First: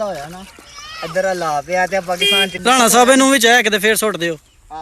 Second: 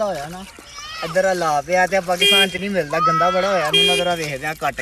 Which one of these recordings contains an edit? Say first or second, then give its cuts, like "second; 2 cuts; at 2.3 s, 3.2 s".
first; 1 cut; at 2.5 s